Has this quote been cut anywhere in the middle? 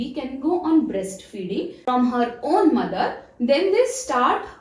no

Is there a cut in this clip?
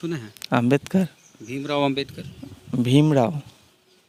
no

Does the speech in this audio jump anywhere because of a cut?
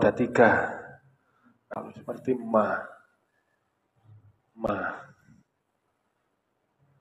yes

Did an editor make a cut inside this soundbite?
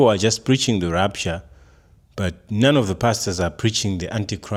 no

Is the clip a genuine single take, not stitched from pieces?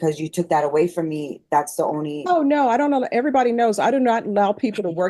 yes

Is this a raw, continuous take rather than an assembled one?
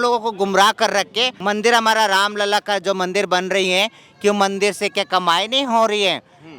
no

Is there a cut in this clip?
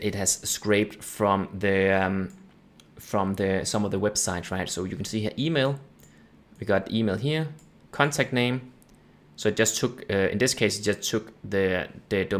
no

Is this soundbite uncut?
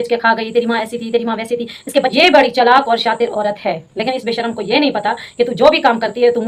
no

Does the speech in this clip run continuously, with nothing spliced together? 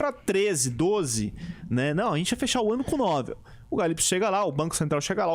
yes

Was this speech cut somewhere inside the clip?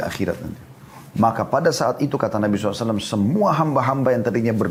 no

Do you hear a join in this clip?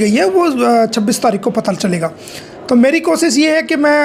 no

